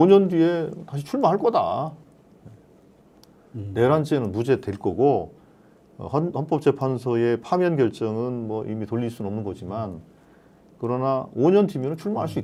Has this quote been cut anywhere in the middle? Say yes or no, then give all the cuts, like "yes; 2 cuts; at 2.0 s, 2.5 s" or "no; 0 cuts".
no; 0 cuts